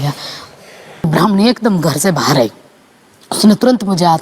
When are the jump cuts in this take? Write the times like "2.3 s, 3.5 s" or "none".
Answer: 1.1 s